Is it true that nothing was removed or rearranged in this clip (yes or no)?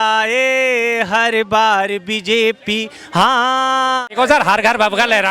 no